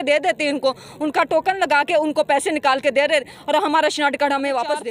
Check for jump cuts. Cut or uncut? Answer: uncut